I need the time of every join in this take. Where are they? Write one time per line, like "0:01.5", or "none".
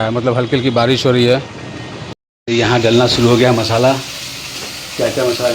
0:02.0